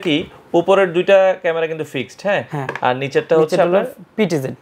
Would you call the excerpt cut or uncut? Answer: uncut